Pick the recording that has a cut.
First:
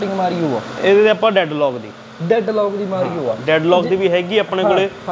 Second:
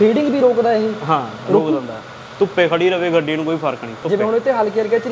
second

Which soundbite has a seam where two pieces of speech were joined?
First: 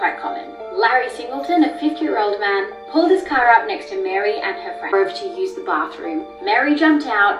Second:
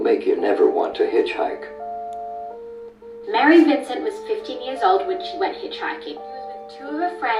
first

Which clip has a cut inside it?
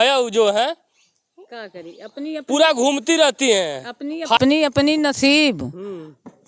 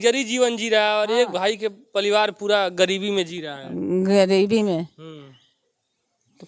first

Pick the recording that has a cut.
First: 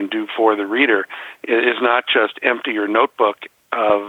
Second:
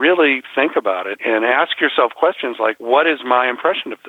second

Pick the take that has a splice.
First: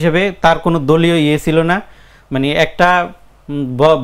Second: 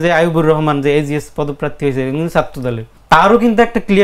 second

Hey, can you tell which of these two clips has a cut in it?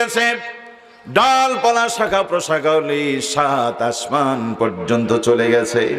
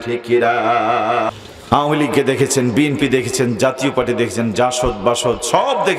second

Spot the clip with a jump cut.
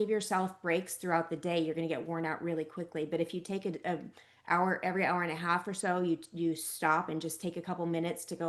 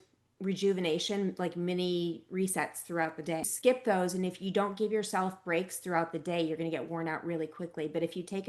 second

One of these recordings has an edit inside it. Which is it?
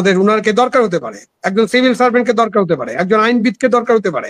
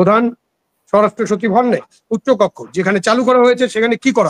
second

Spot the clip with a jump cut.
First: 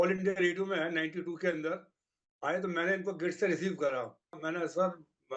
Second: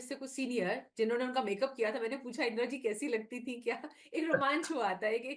first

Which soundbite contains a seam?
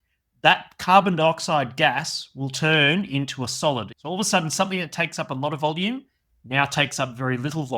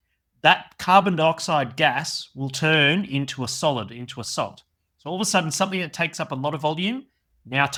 first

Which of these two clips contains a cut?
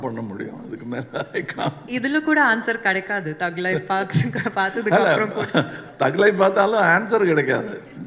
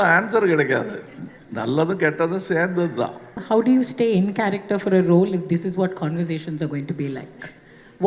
second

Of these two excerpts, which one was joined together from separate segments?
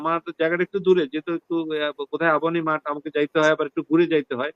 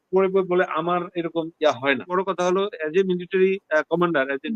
second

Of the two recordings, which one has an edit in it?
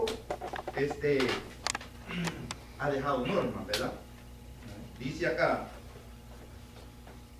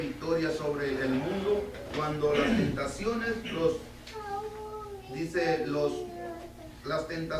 second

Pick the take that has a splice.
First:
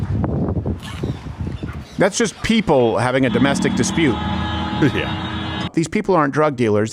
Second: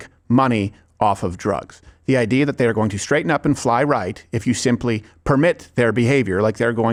first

